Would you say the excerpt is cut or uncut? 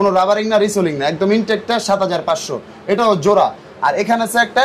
uncut